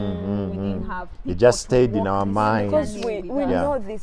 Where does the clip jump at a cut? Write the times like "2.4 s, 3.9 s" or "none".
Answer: none